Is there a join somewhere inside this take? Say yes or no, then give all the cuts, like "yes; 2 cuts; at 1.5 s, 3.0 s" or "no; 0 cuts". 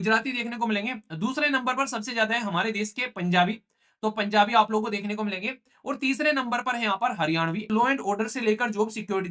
yes; 1 cut; at 7.7 s